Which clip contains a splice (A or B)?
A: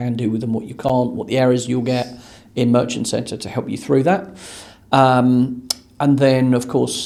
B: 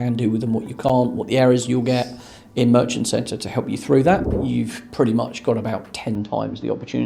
B